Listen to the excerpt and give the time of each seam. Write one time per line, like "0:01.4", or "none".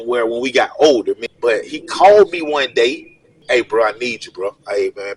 0:01.3
0:03.4